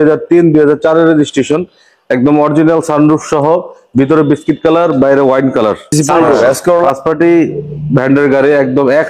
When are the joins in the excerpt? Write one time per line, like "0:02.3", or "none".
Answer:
0:06.9